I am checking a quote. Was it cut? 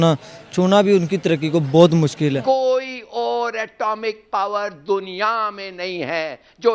yes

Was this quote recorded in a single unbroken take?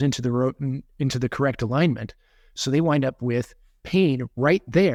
yes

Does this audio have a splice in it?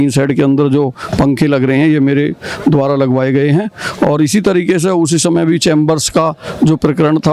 no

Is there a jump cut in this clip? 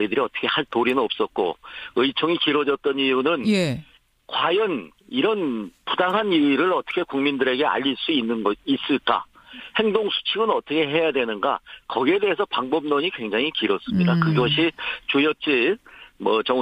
yes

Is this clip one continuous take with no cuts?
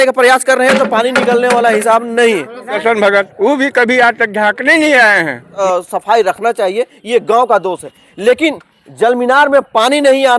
no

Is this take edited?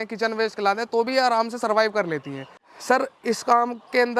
yes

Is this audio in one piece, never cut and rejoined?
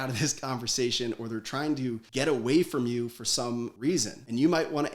no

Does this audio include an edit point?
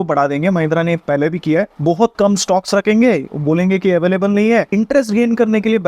yes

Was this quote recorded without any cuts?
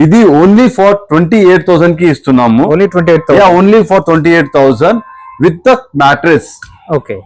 yes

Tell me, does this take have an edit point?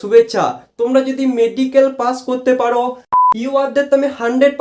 yes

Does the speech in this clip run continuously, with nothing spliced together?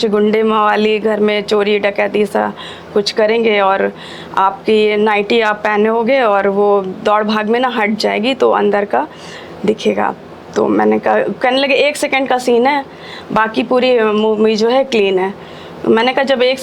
yes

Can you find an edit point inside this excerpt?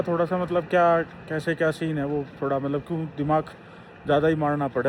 no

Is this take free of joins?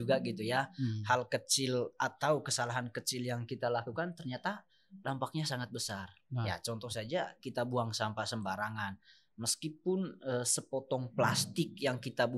yes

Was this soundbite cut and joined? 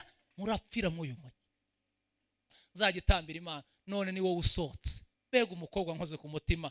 yes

